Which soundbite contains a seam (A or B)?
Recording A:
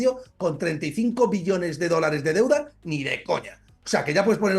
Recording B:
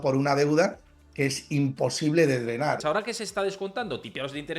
B